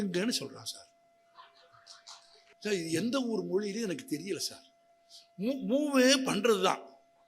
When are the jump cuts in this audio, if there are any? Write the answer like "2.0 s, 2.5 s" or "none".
2.5 s